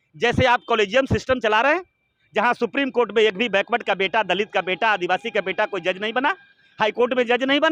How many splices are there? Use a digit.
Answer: 0